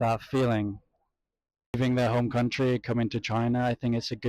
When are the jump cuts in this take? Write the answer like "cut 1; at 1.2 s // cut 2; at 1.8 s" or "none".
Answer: cut 1; at 1.8 s